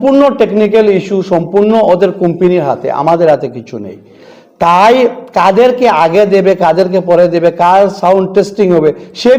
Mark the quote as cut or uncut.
uncut